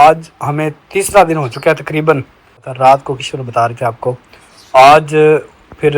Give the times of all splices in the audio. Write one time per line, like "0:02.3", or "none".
0:02.7